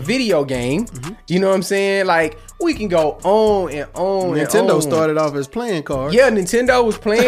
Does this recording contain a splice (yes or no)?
no